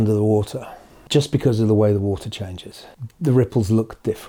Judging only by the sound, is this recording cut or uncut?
uncut